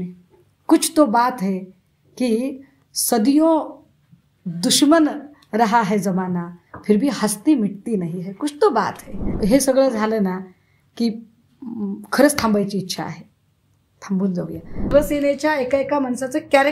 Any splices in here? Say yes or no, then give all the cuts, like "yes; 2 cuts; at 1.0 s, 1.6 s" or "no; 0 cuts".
yes; 2 cuts; at 9.3 s, 14.9 s